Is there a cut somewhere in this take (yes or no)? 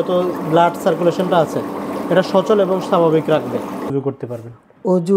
yes